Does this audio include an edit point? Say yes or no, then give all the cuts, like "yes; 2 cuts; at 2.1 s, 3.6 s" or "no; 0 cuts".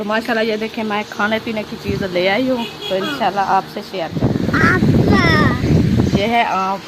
yes; 1 cut; at 4.1 s